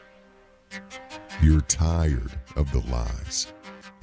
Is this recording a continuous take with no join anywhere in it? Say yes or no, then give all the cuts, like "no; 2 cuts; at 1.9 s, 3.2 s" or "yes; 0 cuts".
no; 1 cut; at 1.4 s